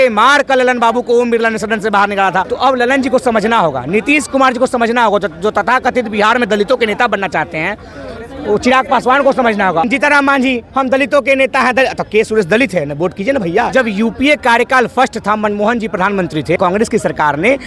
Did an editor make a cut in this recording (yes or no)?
yes